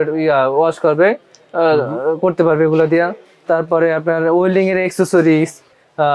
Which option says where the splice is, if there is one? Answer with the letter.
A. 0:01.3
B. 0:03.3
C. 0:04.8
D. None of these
D